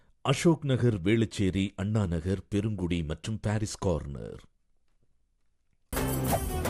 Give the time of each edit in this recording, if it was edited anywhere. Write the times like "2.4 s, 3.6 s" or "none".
none